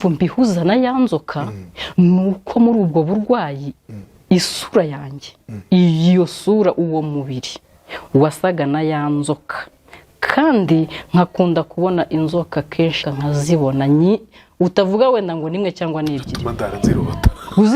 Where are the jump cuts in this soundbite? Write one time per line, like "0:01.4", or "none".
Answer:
0:13.0